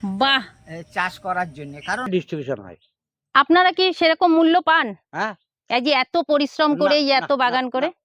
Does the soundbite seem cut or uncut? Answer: cut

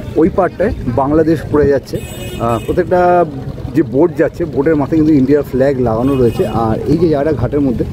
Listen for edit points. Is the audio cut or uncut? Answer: uncut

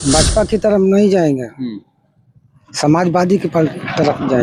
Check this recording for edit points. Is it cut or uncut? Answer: uncut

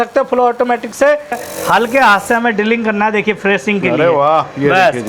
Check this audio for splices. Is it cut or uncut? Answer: cut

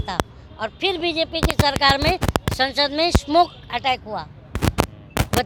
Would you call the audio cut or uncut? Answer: uncut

